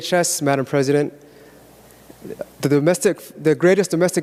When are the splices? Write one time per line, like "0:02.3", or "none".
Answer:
none